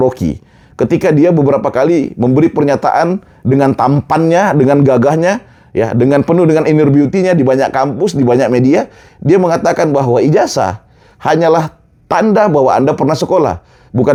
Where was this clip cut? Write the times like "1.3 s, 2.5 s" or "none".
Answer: none